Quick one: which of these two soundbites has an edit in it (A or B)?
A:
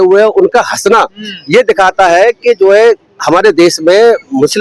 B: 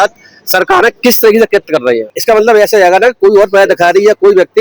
B